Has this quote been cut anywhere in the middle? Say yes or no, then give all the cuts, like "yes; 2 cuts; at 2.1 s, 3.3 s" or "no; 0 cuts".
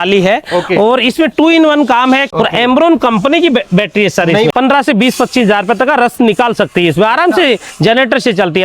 yes; 2 cuts; at 2.3 s, 4.5 s